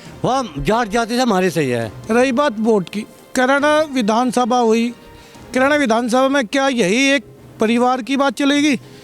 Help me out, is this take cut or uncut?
cut